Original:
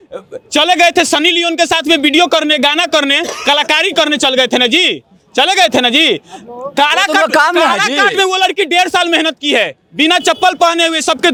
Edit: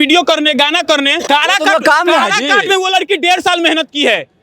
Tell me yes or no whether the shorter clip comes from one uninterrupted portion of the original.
no